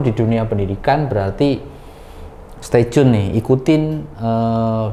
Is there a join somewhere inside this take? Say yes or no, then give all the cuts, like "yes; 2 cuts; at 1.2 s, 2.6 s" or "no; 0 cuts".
no; 0 cuts